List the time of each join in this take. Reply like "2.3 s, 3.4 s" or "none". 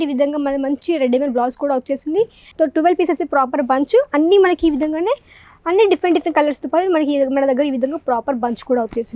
2.4 s